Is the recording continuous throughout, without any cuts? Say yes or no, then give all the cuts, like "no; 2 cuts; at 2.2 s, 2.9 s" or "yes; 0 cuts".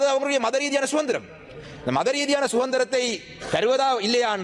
yes; 0 cuts